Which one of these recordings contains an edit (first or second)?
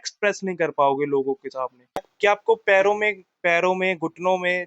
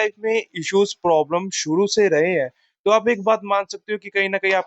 first